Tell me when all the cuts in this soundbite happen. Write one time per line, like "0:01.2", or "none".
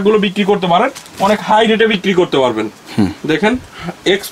none